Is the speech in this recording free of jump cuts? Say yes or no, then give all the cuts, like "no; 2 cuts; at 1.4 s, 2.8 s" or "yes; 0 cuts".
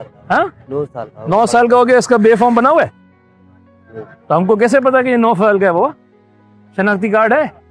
yes; 0 cuts